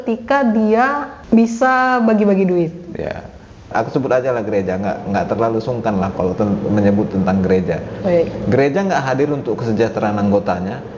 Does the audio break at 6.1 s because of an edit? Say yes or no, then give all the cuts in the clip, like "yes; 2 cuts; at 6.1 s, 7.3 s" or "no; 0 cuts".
no; 2 cuts; at 1.1 s, 3.7 s